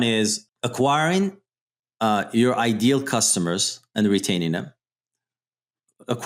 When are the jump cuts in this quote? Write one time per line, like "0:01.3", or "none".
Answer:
none